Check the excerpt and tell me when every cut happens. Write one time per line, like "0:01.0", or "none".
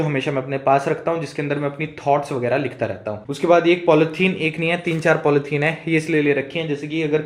none